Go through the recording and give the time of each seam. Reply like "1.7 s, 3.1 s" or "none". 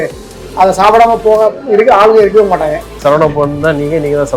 2.9 s